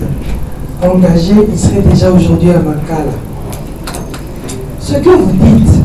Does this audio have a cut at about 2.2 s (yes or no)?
no